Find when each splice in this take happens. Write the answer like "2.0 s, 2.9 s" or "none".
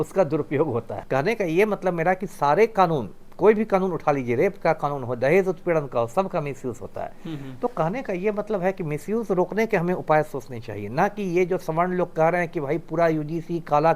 none